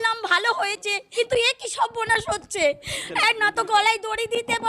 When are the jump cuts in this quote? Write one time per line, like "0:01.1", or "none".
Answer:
0:01.0
0:02.9